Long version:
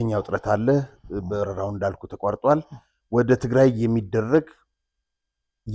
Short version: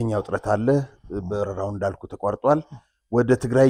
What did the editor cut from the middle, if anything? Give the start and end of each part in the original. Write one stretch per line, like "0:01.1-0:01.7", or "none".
none